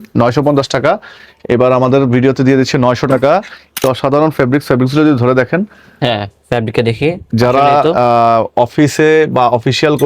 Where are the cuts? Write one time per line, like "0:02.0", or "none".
0:03.8